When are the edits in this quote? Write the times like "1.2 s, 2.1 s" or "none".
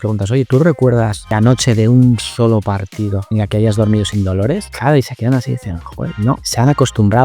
1.3 s, 3.2 s, 4.7 s, 6.5 s